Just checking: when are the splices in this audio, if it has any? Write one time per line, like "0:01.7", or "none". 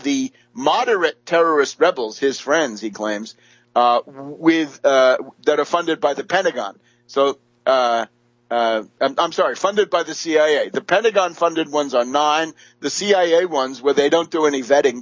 0:04.9

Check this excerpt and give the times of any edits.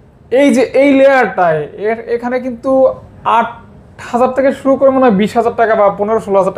none

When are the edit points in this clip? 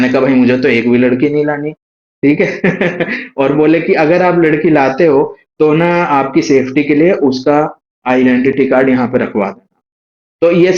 none

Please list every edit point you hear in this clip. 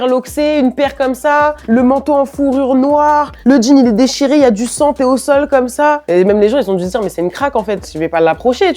0:01.6
0:07.8

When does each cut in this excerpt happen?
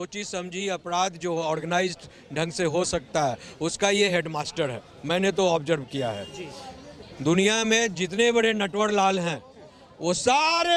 none

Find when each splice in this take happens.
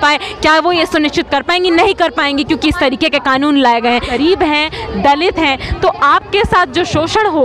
0:04.1

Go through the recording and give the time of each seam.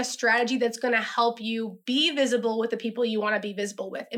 none

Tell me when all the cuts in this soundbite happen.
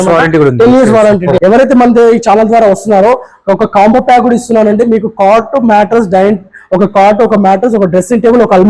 0:01.4

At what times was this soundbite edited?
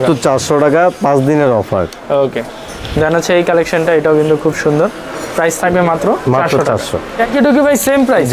0:07.3

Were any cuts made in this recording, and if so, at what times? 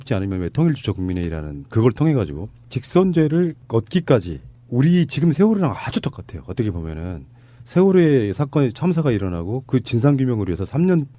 0:04.2

